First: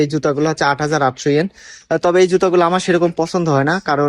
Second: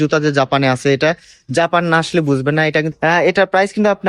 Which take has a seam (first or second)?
second